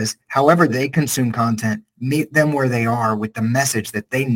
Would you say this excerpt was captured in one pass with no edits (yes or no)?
yes